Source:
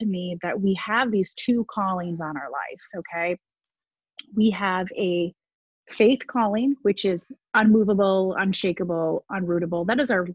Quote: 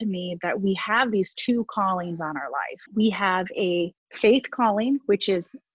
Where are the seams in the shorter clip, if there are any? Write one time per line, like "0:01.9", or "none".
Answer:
0:02.8
0:04.0